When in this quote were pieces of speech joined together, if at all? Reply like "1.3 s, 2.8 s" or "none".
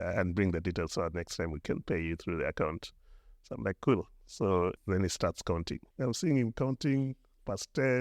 4.8 s, 5.8 s